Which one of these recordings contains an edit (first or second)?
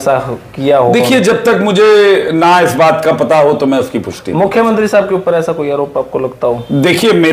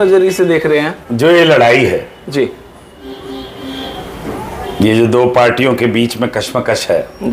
second